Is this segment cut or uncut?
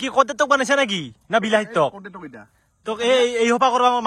uncut